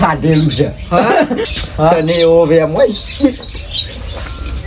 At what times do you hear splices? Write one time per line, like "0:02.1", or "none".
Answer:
0:01.4